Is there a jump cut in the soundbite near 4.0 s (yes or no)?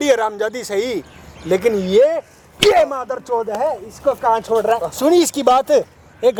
no